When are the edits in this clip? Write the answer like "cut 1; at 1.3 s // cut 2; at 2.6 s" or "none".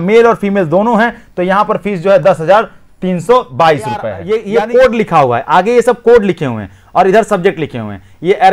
cut 1; at 4.1 s